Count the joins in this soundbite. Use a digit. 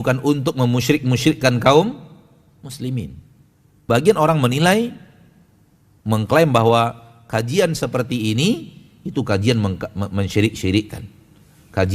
1